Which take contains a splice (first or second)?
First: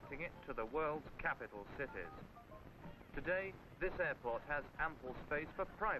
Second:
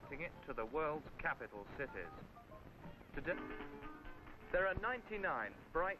first